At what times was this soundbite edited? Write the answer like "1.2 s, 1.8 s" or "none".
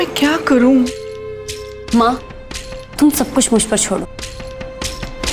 4.1 s

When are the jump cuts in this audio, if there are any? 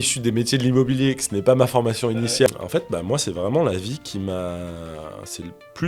2.5 s

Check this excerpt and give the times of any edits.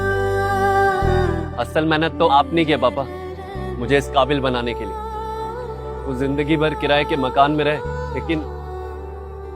1.3 s

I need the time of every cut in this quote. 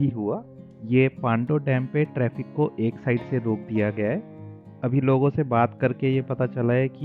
none

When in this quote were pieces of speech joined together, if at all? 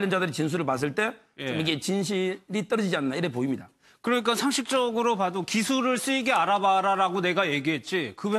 none

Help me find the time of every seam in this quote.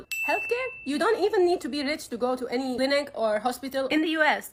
none

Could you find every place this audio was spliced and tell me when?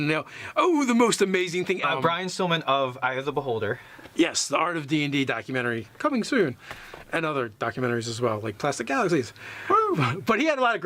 none

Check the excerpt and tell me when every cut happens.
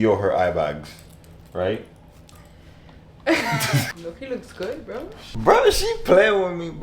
3.9 s

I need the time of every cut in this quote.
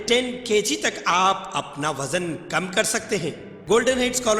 3.5 s

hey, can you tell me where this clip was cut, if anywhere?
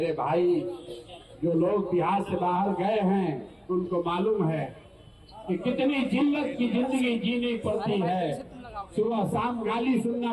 none

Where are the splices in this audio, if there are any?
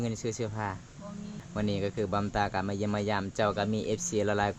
1.4 s

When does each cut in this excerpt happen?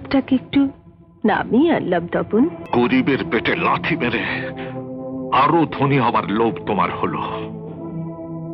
2.6 s

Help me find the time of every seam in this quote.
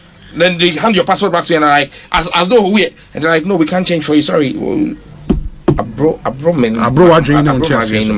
5.8 s

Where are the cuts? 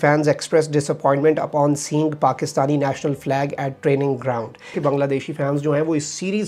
4.8 s

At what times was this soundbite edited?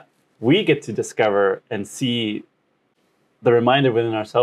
none

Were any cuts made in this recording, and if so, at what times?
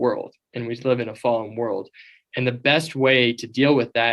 none

